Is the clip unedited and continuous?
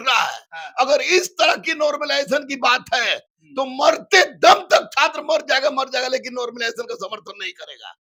yes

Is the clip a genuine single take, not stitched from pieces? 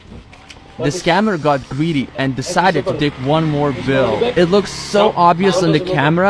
yes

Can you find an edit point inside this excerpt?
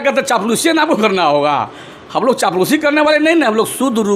no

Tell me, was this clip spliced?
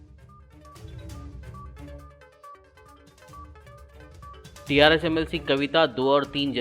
no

